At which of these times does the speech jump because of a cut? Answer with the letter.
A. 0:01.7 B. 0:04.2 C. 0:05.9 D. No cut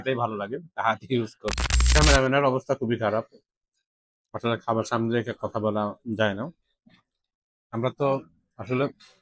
A